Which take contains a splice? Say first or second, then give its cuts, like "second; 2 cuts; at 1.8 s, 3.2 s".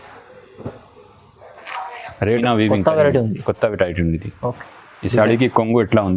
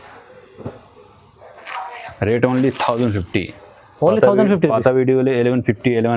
first; 1 cut; at 2.4 s